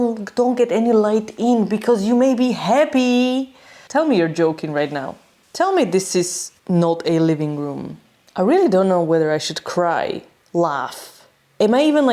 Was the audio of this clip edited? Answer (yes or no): no